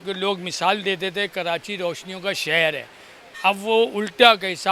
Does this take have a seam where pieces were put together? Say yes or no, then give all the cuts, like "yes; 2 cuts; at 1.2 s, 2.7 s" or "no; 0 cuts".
no; 0 cuts